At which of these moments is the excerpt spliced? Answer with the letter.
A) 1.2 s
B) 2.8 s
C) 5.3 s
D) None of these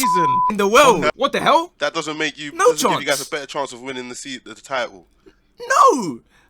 A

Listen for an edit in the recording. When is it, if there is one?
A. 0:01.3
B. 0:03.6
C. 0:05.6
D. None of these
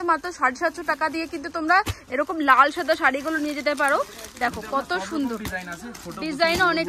D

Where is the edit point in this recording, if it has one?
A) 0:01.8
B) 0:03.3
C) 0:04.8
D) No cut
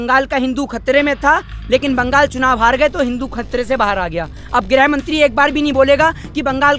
D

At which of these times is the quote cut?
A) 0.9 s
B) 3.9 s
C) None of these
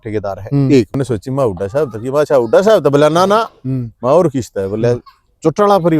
A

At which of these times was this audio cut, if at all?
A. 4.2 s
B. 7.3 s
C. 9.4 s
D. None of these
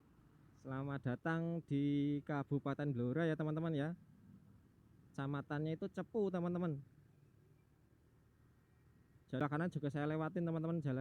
C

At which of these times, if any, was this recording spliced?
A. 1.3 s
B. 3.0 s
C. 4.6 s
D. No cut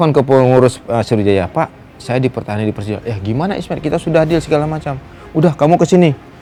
D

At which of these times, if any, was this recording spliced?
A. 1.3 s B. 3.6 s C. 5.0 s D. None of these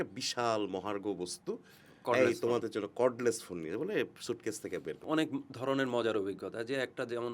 C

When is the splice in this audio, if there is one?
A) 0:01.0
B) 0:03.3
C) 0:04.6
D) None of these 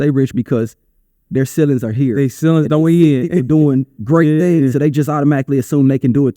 D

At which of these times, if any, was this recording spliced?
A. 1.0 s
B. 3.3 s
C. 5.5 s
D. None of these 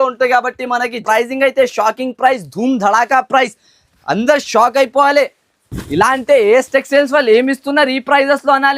A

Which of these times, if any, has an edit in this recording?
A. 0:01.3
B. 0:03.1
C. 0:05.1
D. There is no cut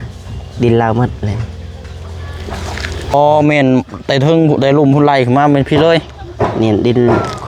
B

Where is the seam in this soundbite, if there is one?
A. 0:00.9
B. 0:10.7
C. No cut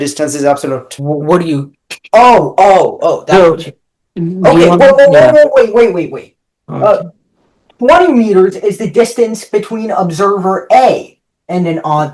A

